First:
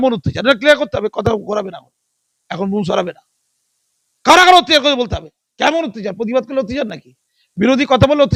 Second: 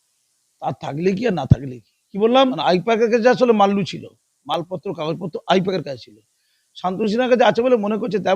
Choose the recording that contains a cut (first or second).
second